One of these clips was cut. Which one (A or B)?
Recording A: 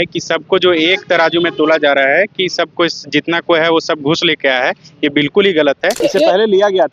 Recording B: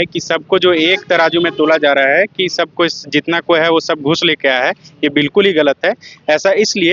A